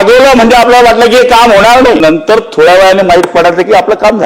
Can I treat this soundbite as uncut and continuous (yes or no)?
no